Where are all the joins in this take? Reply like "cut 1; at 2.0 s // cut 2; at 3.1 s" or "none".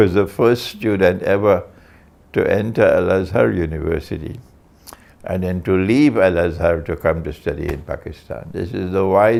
none